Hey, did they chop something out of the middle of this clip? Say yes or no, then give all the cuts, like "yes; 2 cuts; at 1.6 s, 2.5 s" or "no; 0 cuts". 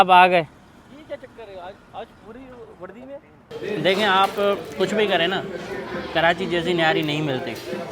yes; 1 cut; at 3.5 s